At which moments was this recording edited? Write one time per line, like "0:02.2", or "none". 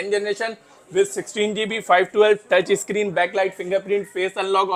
none